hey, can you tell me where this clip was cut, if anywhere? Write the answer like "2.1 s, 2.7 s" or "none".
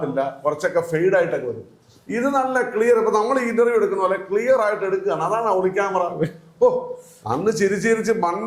none

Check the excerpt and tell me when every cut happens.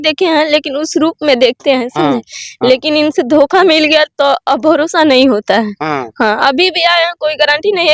none

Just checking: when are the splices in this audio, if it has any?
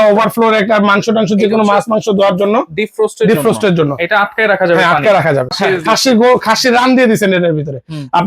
5.5 s

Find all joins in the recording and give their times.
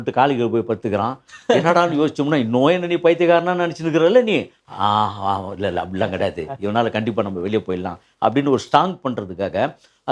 none

